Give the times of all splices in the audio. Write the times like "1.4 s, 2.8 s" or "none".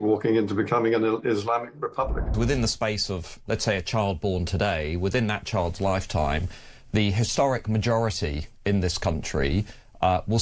2.3 s

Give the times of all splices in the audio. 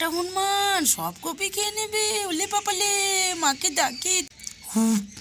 4.3 s

